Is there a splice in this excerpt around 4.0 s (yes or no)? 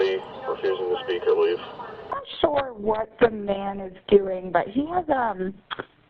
no